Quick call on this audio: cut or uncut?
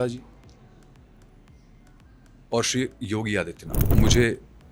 cut